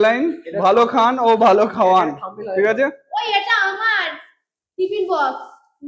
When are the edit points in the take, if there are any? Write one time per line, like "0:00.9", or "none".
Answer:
none